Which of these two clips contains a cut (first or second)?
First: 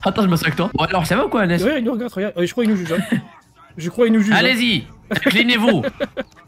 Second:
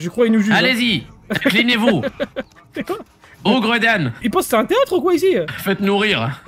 second